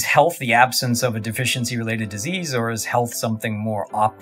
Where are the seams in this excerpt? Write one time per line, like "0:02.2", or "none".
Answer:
none